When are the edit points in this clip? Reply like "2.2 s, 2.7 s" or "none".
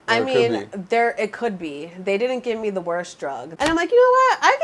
3.4 s